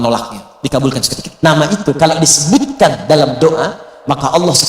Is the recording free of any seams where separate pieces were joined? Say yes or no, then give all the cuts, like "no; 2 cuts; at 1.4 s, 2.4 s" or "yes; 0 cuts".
no; 1 cut; at 1.2 s